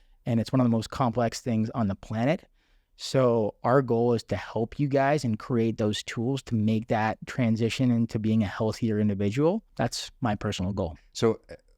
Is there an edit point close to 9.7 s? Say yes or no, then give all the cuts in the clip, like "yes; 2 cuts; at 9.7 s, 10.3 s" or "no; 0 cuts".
yes; 1 cut; at 9.7 s